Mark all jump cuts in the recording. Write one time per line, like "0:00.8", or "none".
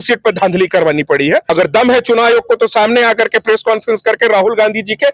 0:01.5

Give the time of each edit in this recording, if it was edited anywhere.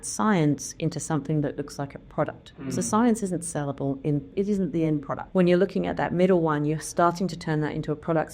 0:04.3
0:05.2

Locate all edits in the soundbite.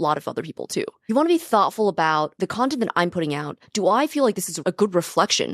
0:01.1
0:02.3
0:04.5

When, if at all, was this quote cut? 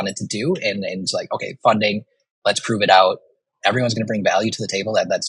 0:03.5

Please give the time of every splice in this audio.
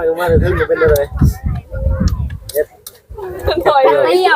0:03.5

